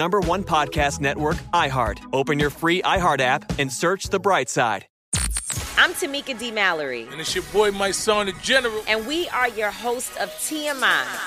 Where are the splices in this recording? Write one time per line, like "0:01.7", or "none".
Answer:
0:04.9